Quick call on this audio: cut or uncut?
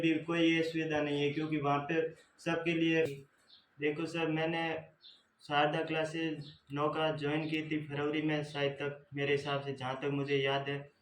cut